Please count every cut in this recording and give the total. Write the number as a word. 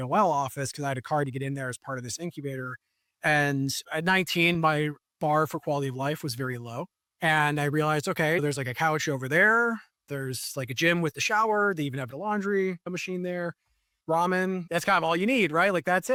zero